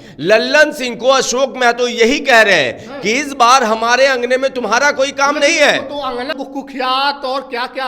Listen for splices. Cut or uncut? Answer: cut